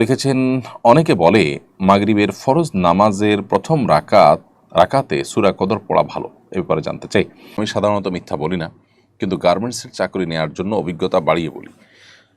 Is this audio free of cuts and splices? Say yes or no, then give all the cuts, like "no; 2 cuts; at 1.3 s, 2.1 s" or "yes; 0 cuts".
no; 1 cut; at 7.4 s